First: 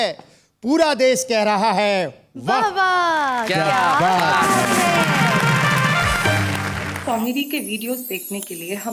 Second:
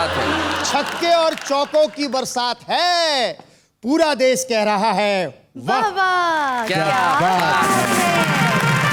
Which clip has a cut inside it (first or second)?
first